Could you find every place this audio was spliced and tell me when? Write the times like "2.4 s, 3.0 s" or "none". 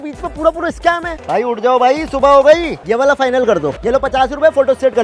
1.1 s, 2.8 s, 3.8 s